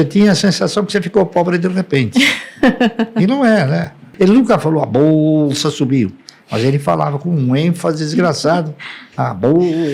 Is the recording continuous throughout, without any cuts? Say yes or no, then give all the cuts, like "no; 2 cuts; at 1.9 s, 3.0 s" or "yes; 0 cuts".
no; 1 cut; at 4.1 s